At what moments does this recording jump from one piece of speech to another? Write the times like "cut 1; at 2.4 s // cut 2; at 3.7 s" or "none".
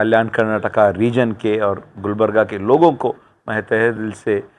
none